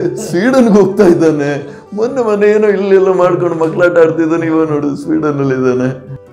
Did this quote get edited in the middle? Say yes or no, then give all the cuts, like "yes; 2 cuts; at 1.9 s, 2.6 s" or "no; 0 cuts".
no; 0 cuts